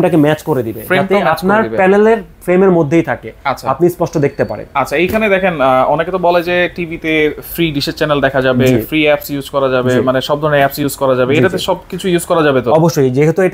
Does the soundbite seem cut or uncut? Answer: uncut